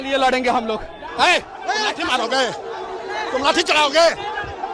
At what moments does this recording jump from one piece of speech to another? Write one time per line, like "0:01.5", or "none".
0:01.1